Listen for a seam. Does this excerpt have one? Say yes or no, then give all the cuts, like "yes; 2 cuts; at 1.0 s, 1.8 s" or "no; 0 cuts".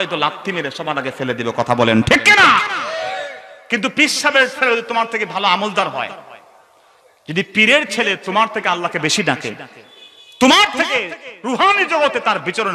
no; 0 cuts